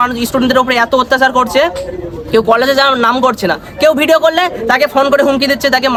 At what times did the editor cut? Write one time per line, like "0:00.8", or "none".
none